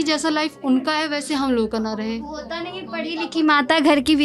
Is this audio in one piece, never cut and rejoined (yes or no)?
yes